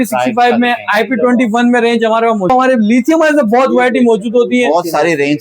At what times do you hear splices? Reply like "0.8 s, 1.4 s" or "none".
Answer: 2.5 s